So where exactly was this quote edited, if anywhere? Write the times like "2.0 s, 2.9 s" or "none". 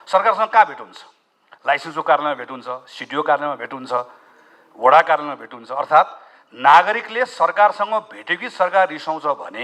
none